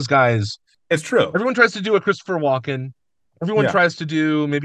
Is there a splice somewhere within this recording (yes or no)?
no